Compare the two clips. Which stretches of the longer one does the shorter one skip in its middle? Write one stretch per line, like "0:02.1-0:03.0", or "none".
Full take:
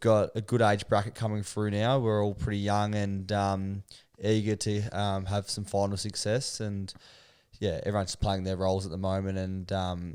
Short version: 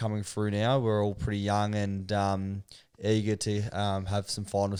none